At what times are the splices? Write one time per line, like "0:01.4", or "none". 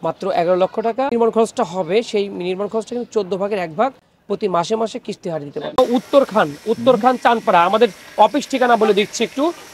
0:01.1
0:05.8